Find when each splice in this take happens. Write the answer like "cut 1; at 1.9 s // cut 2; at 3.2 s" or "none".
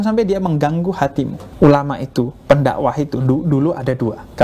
cut 1; at 1.4 s